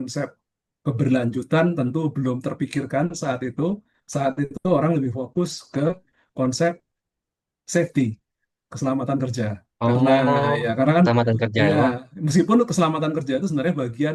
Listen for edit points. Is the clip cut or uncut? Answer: uncut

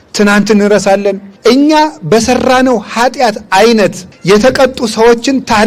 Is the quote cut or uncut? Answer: cut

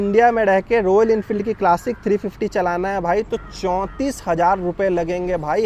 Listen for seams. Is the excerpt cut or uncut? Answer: uncut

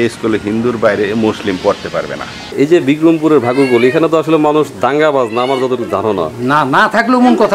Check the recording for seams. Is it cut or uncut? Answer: cut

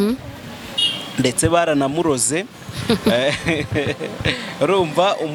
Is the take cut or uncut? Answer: uncut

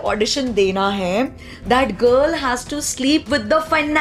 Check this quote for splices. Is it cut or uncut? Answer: uncut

